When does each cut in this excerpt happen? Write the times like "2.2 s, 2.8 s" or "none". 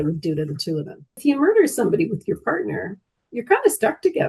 1.1 s